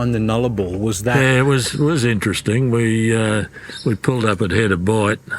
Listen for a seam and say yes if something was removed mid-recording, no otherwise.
yes